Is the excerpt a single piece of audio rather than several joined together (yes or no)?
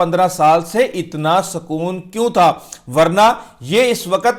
yes